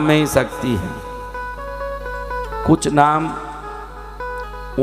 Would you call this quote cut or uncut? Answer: uncut